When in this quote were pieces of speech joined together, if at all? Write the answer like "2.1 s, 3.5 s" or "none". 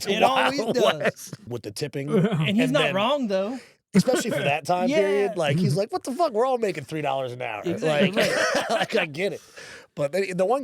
1.5 s